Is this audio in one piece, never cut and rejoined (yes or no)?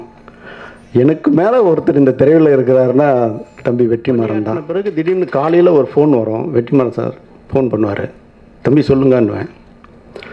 no